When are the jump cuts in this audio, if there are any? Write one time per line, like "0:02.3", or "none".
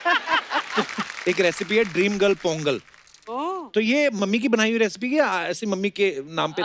0:01.0